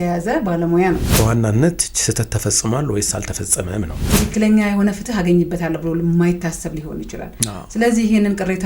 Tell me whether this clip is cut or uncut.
cut